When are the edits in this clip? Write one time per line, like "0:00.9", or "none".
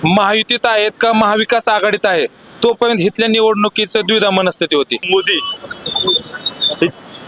0:05.0